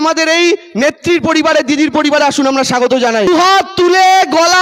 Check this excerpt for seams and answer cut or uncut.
cut